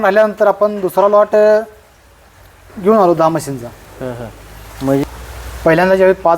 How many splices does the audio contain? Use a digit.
1